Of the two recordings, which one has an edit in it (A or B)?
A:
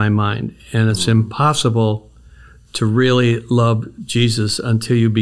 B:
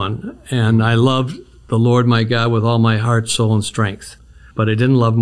B